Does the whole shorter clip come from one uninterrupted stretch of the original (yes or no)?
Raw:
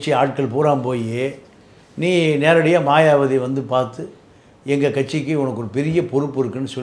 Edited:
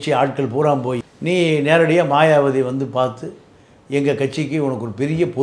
no